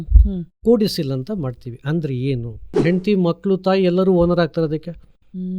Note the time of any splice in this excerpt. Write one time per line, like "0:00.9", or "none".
0:02.8